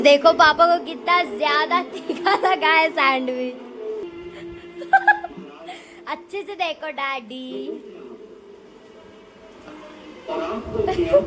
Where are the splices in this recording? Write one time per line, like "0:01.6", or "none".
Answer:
0:04.1

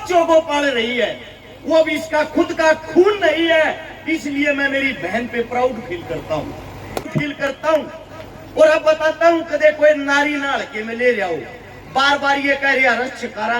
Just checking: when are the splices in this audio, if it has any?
0:07.0

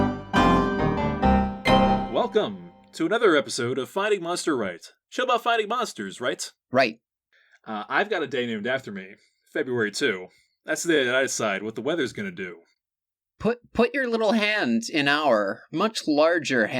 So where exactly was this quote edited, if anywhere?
0:02.1

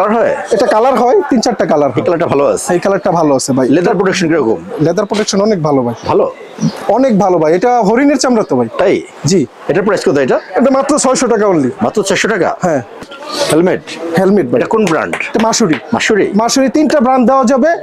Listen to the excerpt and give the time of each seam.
0:13.0

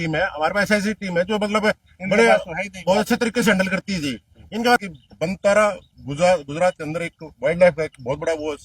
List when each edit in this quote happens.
0:04.8

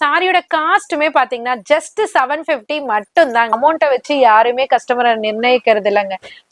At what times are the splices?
0:03.5

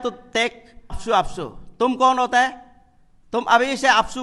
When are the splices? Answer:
0:01.0

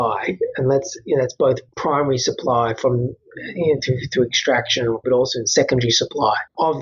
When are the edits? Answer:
0:01.7
0:05.0

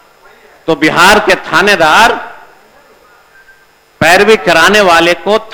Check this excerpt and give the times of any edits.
none

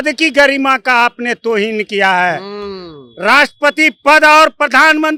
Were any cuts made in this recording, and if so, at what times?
none

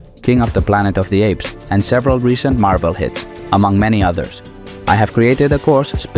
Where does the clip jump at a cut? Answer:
0:03.1

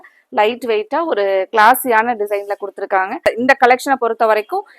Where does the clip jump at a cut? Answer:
0:03.2

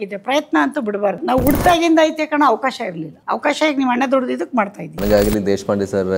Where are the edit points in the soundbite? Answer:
0:01.2
0:03.1
0:04.8

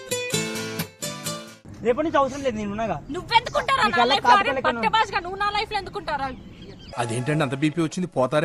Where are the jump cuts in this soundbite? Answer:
0:01.5

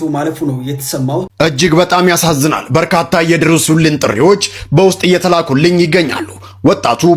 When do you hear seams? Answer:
0:01.3

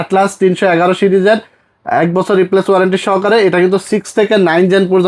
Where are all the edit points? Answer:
none

